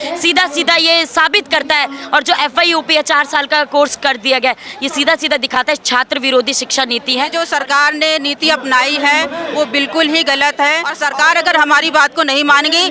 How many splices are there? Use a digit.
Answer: 2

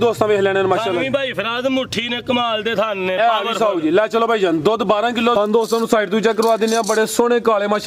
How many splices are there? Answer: 1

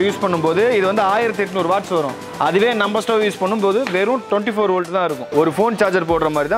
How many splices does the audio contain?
0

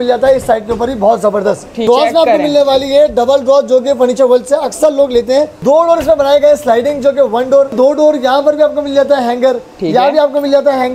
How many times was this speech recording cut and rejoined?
3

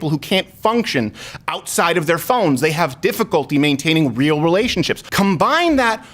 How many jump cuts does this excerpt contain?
1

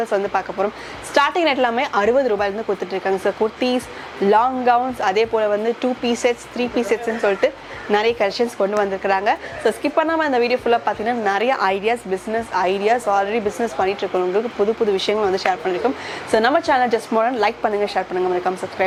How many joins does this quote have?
0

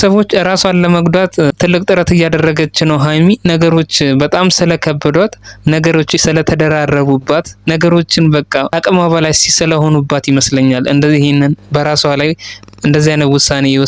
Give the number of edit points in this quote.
2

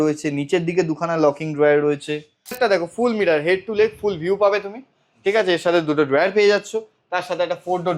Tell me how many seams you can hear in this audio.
1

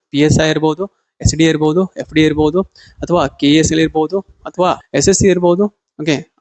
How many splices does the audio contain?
1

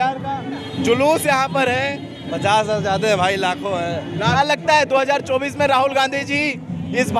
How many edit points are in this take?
1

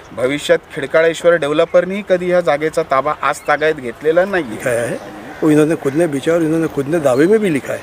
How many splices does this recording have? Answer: 1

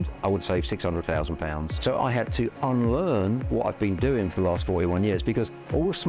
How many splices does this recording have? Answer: 1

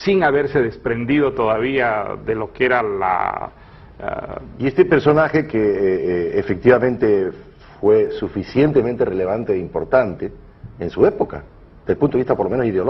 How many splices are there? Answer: 0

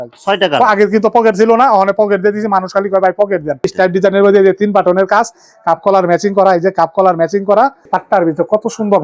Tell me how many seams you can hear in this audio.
2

